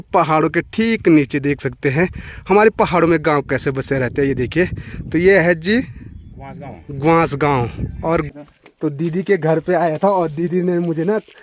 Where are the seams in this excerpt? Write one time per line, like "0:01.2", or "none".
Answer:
0:08.3